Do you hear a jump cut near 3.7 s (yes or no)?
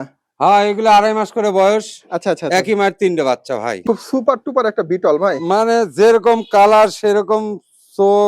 yes